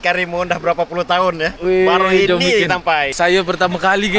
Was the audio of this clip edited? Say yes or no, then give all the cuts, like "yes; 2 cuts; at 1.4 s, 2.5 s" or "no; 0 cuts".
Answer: yes; 1 cut; at 3.1 s